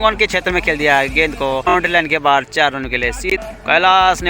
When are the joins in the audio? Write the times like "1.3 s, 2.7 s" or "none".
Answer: 1.7 s, 3.3 s